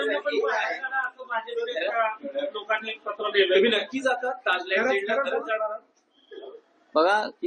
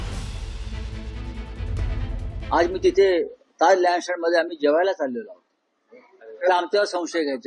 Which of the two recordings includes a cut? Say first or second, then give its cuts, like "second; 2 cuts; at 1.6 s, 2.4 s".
second; 1 cut; at 2.5 s